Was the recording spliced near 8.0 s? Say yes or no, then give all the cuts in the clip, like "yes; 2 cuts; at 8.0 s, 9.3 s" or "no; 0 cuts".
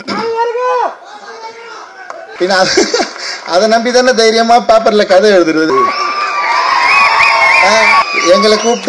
yes; 3 cuts; at 2.3 s, 5.7 s, 8.0 s